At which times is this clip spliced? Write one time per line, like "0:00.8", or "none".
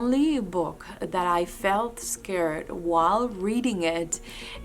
none